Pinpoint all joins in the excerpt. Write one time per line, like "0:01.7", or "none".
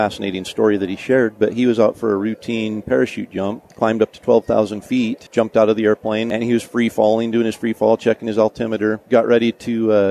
0:03.6
0:05.2
0:06.3
0:09.0